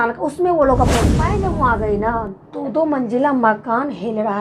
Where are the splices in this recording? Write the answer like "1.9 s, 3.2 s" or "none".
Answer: 1.3 s